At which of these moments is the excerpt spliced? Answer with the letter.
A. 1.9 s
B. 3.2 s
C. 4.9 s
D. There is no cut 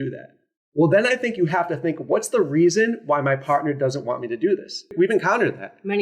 C